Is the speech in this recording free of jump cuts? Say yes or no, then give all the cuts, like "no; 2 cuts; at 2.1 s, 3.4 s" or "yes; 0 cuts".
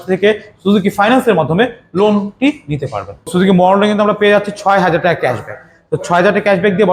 no; 1 cut; at 3.3 s